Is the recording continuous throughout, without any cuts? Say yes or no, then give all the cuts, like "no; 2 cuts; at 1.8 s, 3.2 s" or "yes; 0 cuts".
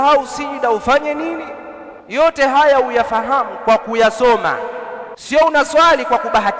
no; 2 cuts; at 2.2 s, 5.2 s